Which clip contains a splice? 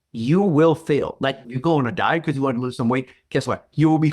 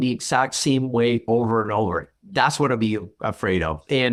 first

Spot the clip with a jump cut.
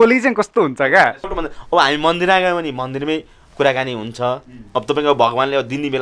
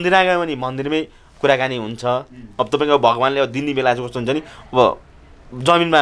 first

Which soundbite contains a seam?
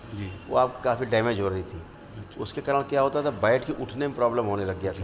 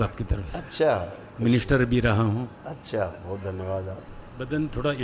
second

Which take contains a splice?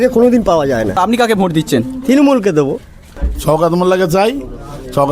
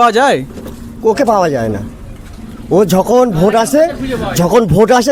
first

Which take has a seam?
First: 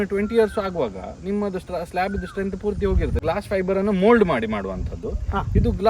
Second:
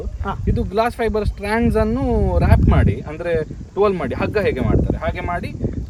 first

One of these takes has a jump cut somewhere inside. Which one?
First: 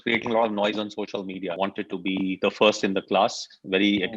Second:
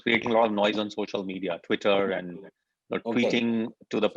first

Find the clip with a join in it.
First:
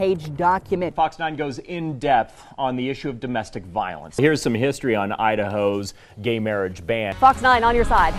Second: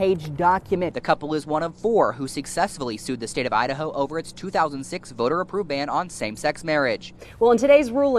first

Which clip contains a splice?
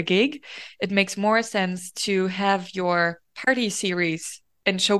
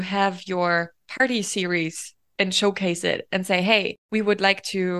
second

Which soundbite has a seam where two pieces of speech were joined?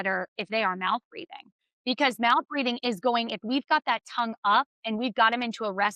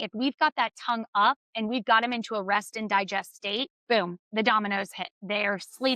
second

